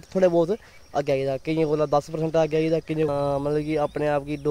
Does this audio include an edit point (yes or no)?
yes